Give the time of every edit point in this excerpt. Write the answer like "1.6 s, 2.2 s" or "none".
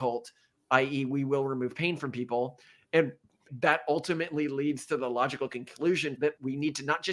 3.4 s, 6.3 s